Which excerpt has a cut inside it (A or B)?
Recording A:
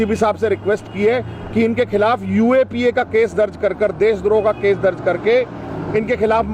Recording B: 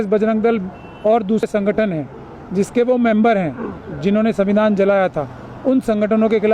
B